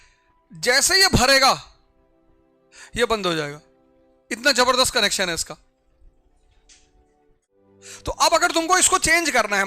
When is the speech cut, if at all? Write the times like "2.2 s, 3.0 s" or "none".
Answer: 7.6 s